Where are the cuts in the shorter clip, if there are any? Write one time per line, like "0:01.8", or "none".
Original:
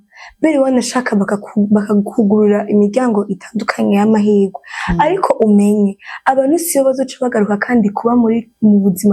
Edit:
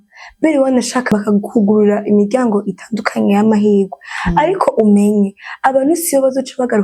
0:01.1